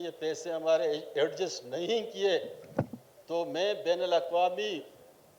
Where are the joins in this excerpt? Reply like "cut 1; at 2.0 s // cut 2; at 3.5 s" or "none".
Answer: none